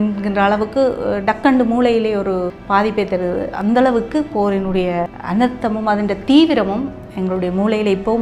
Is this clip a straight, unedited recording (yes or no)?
no